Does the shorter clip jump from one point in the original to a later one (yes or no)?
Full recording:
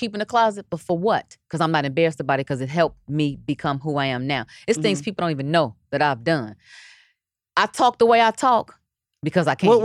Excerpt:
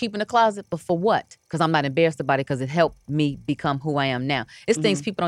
no